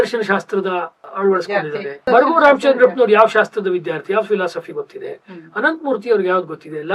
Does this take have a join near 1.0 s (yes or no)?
yes